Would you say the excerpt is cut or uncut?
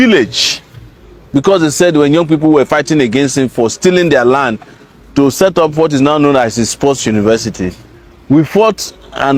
uncut